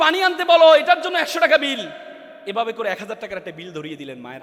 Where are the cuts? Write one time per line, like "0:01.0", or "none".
none